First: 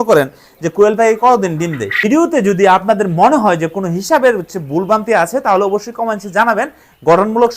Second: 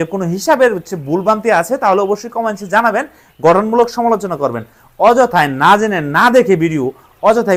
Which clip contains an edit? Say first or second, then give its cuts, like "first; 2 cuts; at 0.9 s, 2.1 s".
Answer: first; 1 cut; at 2.1 s